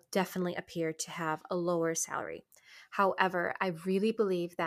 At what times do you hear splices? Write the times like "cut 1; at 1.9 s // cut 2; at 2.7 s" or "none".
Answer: none